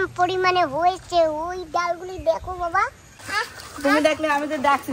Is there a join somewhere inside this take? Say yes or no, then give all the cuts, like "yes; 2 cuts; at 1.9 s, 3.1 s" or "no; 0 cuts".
yes; 1 cut; at 3.1 s